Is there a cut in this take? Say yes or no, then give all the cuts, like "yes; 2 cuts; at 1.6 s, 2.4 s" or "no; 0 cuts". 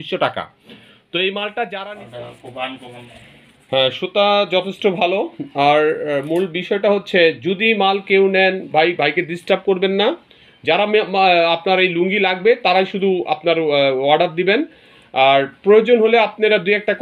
yes; 1 cut; at 1.8 s